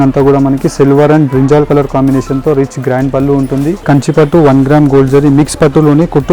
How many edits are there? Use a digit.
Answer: 1